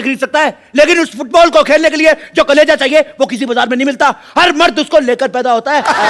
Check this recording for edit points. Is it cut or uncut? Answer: uncut